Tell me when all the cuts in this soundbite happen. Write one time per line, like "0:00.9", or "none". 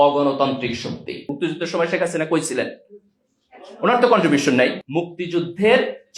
0:01.2
0:04.8